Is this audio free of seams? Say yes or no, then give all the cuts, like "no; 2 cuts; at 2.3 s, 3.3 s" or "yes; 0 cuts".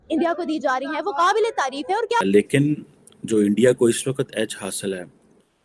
no; 1 cut; at 2.2 s